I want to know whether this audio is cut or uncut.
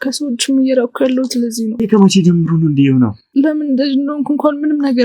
cut